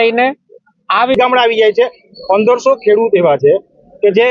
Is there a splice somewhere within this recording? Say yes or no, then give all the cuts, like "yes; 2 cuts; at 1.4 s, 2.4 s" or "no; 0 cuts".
yes; 1 cut; at 1.1 s